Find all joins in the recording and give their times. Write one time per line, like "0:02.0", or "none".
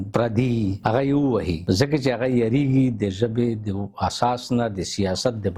none